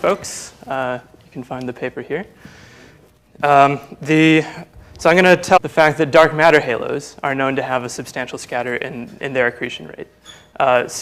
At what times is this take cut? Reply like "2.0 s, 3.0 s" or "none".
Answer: none

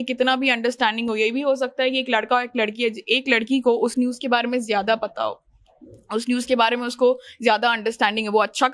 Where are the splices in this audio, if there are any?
none

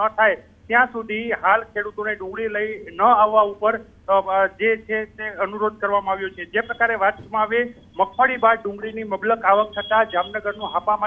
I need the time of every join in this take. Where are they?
1.7 s

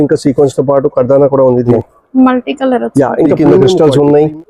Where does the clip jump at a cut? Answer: 1.8 s, 3.8 s

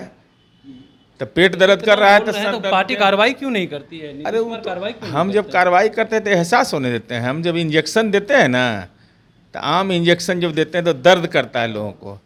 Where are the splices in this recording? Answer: none

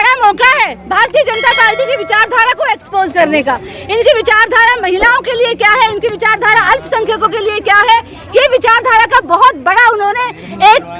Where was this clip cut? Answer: none

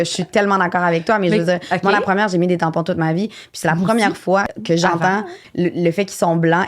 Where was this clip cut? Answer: 4.5 s, 5.4 s

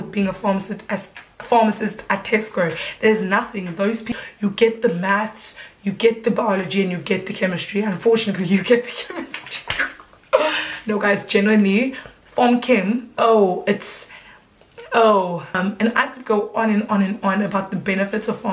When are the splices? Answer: 4.1 s, 15.6 s

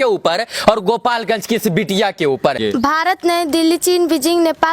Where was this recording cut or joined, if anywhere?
2.6 s

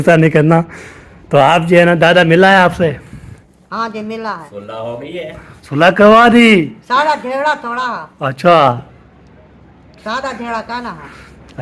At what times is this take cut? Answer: none

